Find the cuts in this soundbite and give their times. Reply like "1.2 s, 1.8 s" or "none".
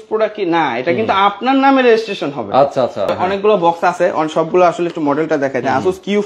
3.1 s